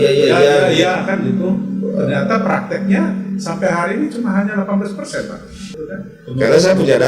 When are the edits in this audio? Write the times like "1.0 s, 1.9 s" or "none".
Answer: 5.7 s